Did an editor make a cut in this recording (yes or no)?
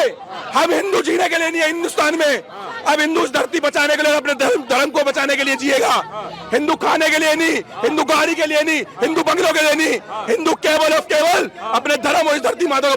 no